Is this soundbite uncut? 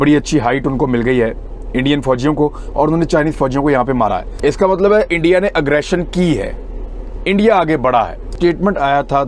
yes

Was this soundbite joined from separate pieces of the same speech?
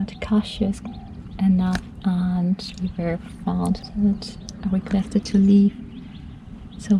yes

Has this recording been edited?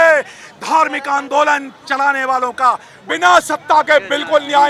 yes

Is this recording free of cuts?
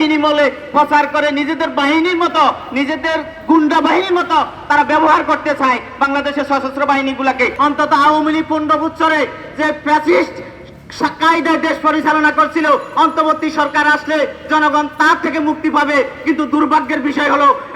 no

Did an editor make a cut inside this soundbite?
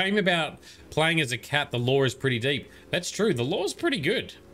no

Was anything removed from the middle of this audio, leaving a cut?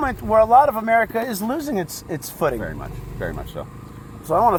no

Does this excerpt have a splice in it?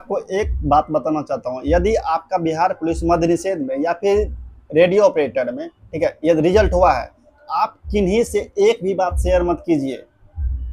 no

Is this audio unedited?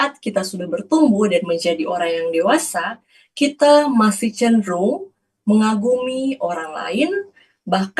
yes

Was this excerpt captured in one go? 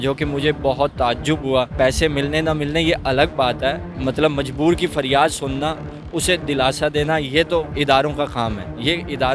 no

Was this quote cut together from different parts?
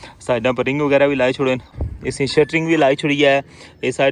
yes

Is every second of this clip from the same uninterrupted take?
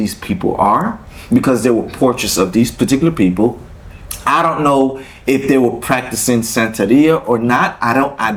yes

